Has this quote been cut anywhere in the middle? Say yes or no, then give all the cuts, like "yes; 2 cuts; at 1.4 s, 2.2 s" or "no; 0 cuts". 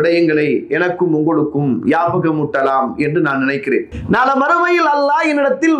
yes; 1 cut; at 3.9 s